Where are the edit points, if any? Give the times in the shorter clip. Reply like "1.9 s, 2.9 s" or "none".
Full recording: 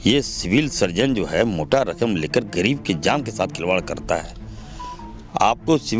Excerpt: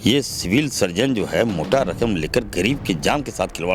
none